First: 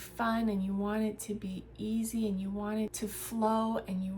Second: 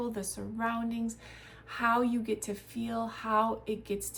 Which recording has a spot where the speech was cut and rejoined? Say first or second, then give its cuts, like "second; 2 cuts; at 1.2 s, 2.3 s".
first; 1 cut; at 2.9 s